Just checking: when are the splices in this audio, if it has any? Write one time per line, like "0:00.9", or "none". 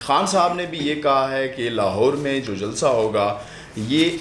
none